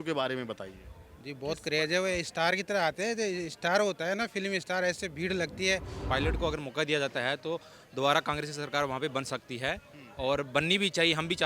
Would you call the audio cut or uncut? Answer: cut